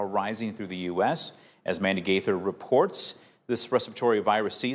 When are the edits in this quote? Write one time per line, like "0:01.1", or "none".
none